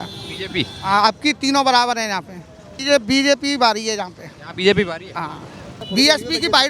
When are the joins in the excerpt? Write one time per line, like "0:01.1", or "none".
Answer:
0:02.8
0:05.7